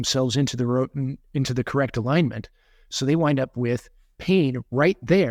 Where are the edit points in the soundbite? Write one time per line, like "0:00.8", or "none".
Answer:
none

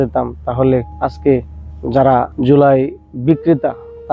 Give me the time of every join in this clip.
0:00.9
0:02.3

